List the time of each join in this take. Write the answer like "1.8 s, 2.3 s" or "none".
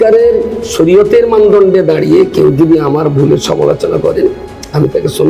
none